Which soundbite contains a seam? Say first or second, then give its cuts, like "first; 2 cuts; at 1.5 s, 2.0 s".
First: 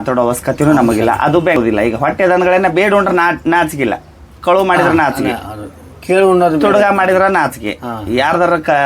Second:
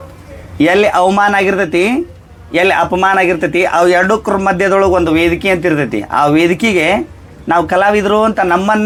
first; 1 cut; at 1.6 s